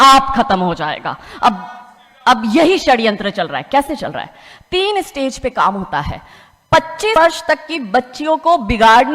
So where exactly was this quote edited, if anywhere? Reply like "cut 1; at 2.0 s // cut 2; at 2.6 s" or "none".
cut 1; at 7.2 s